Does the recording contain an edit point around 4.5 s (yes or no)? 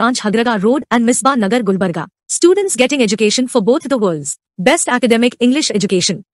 no